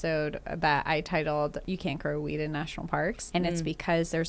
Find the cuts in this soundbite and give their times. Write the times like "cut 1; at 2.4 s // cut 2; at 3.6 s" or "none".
cut 1; at 1.6 s // cut 2; at 3.2 s